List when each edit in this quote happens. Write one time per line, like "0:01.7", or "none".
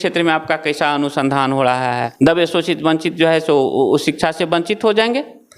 0:02.1